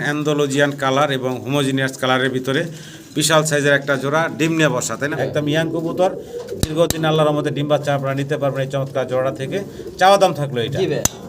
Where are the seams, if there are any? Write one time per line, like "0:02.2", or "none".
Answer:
0:05.1